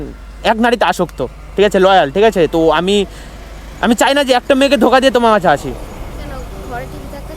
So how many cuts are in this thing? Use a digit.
0